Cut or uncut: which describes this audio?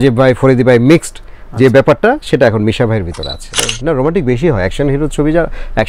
cut